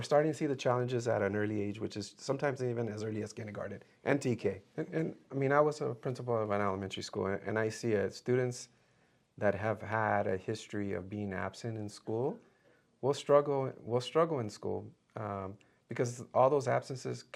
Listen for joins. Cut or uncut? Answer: cut